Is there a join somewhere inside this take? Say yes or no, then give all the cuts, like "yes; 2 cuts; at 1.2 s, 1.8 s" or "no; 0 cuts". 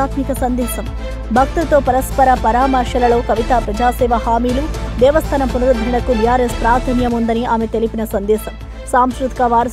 no; 0 cuts